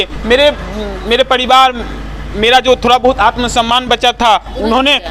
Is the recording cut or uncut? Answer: uncut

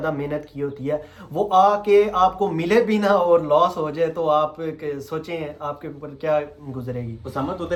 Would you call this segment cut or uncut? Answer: uncut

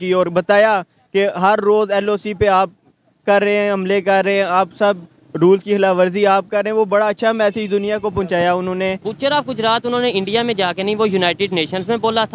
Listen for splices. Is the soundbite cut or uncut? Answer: cut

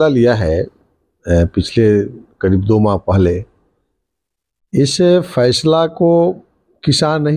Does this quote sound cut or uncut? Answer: uncut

